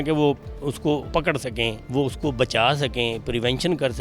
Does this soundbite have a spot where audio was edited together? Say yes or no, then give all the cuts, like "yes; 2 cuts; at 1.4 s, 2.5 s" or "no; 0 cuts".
yes; 1 cut; at 1.4 s